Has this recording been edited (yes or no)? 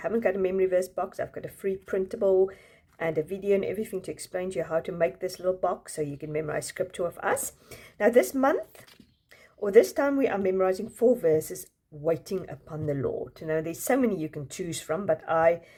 no